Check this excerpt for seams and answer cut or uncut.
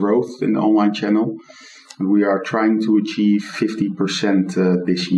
cut